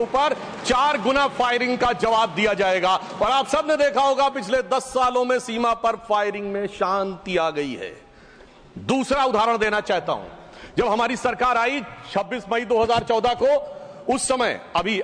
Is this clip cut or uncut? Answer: uncut